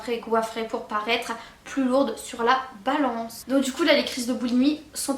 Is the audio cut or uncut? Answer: cut